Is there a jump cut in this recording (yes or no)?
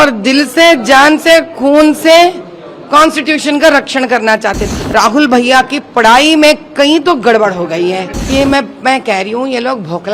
yes